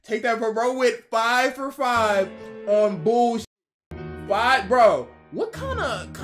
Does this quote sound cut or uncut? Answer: uncut